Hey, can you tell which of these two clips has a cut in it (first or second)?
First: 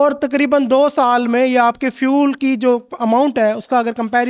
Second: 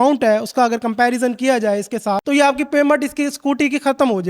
second